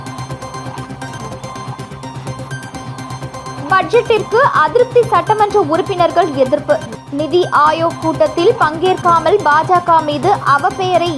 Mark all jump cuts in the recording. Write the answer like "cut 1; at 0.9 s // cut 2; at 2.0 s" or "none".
none